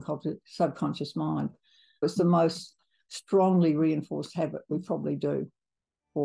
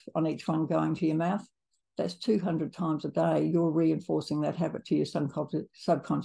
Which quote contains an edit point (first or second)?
first